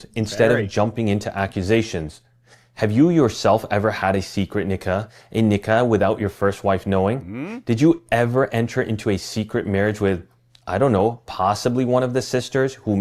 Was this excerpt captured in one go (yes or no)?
no